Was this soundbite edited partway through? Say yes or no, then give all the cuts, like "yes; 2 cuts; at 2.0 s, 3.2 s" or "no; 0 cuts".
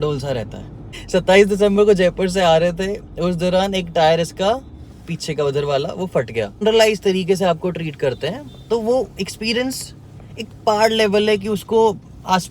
yes; 2 cuts; at 1.1 s, 6.6 s